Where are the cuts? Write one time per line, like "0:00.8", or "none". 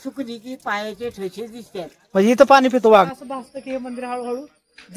0:03.1